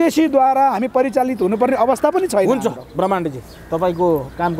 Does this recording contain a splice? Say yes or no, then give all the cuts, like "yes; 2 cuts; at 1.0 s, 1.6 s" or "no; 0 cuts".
no; 0 cuts